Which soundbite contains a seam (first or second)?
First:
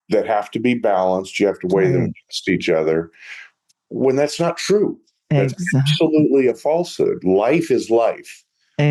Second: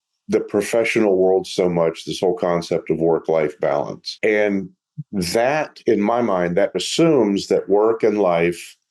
second